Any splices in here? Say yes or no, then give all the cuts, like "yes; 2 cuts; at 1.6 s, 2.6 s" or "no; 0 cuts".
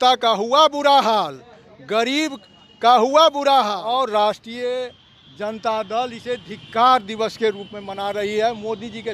yes; 1 cut; at 4.0 s